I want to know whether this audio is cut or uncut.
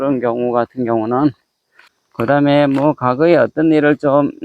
cut